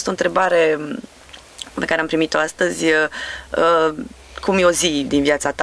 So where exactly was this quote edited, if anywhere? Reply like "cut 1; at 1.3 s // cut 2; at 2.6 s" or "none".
none